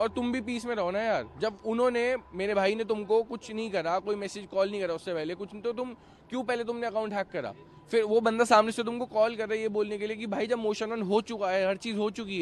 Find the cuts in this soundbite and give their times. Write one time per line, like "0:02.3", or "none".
none